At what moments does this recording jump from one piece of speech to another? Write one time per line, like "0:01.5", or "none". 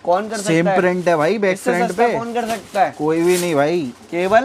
none